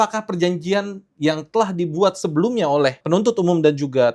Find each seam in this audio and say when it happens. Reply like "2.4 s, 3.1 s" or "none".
3.0 s